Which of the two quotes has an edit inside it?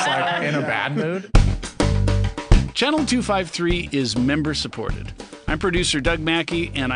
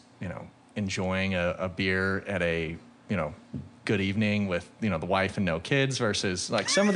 first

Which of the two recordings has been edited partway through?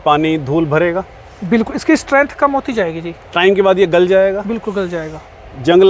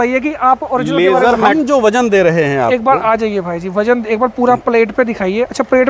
second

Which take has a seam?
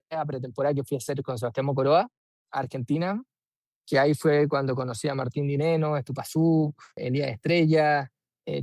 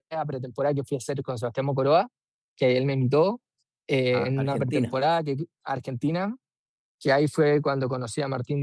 first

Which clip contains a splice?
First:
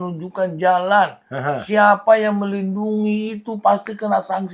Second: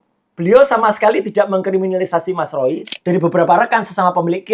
second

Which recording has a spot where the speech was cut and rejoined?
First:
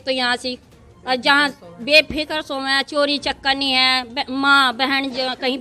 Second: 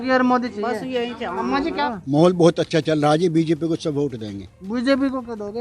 second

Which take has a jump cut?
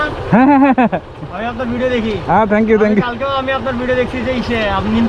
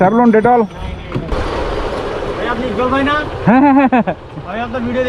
second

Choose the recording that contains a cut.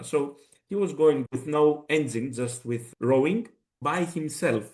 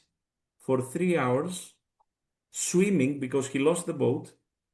first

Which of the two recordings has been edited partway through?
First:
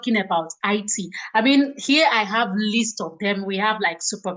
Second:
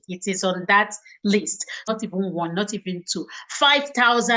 second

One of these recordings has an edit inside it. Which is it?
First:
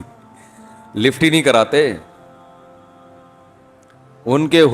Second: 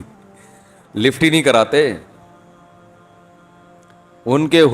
second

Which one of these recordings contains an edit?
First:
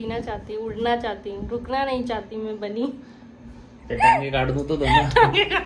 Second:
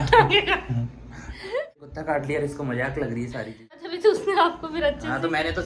second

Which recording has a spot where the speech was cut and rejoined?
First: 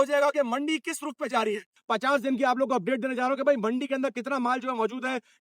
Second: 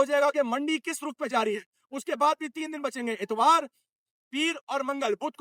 first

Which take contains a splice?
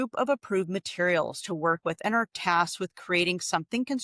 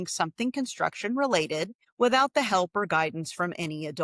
second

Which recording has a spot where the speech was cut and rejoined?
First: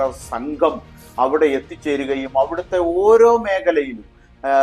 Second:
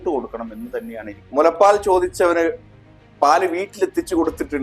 second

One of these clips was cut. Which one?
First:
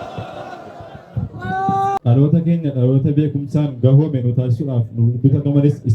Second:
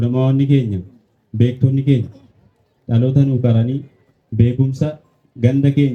first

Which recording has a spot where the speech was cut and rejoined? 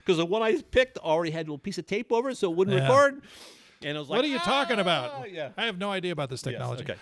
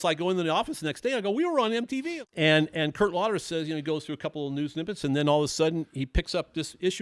second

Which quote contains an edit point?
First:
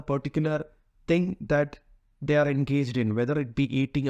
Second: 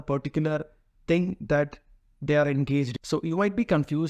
second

